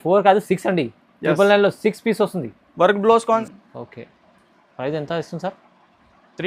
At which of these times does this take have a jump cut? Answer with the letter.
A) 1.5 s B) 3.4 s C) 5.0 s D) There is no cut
B